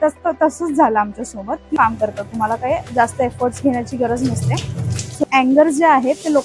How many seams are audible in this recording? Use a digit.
2